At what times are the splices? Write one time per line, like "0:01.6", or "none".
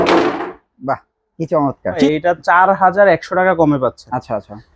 0:02.0